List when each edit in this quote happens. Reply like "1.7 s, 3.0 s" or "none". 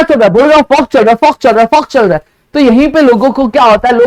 none